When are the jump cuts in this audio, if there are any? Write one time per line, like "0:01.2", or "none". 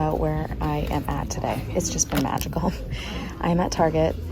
none